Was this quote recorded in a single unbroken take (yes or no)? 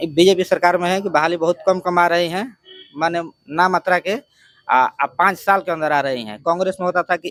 yes